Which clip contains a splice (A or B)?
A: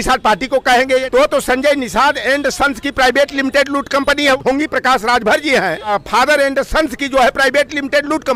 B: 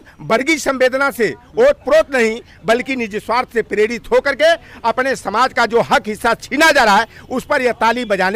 A